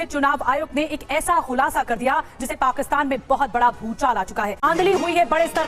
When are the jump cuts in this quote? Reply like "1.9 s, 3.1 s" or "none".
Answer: 4.5 s